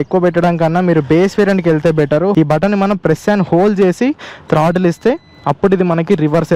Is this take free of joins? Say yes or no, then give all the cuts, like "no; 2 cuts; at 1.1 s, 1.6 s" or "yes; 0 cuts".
no; 1 cut; at 2.3 s